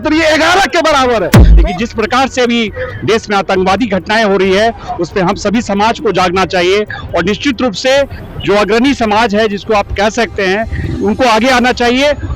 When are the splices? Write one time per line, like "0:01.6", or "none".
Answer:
0:01.5
0:08.3